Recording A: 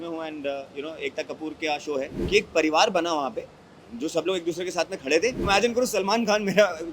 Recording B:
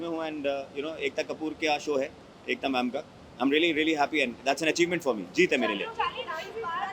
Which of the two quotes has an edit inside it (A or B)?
A